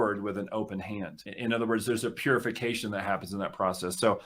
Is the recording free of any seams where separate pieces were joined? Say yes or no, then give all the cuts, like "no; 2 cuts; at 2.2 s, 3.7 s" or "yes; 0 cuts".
no; 1 cut; at 1.3 s